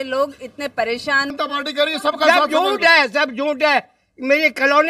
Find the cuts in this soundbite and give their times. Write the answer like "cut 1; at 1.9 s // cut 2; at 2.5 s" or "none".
cut 1; at 1.3 s

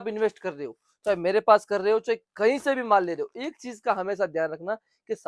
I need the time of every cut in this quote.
none

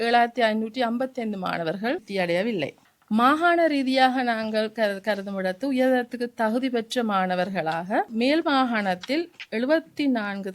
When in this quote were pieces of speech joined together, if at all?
cut 1; at 2.1 s // cut 2; at 8.1 s

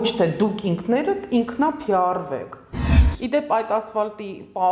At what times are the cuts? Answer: cut 1; at 2.9 s

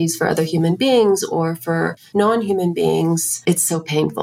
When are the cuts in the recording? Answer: cut 1; at 2.0 s // cut 2; at 3.3 s

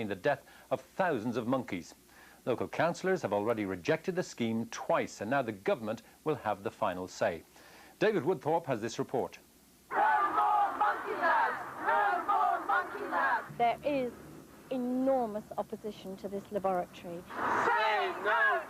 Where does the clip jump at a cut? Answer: cut 1; at 14.5 s

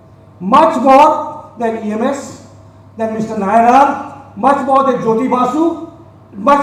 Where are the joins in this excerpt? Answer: none

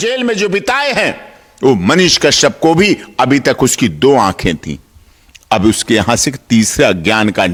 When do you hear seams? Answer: none

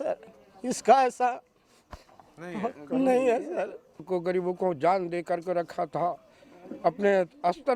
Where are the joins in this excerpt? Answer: cut 1; at 4.1 s

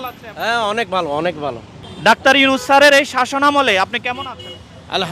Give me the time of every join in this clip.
cut 1; at 2.1 s

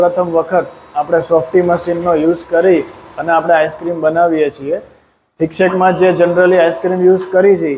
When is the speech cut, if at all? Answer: none

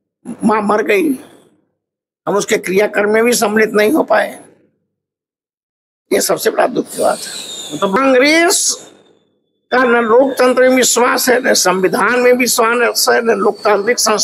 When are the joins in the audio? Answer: cut 1; at 8.0 s

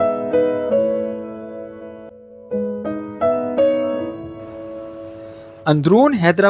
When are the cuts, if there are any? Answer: none

